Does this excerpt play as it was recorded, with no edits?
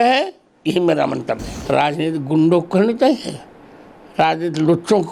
no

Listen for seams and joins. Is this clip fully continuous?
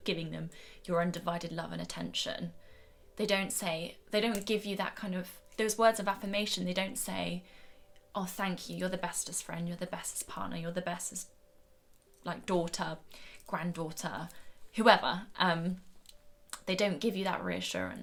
yes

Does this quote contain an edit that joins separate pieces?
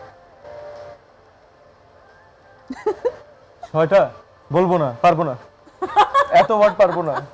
no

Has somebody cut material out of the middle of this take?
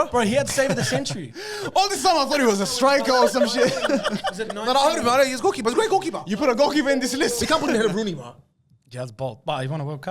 yes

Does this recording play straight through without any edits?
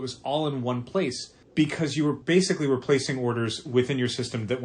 no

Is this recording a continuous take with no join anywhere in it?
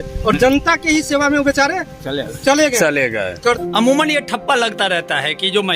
no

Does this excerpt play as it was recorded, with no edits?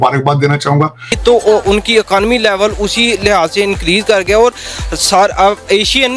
no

